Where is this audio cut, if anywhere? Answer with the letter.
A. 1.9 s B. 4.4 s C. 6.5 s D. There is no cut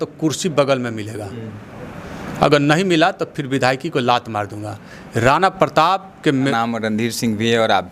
C